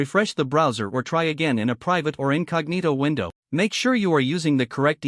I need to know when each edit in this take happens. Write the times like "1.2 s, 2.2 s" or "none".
3.4 s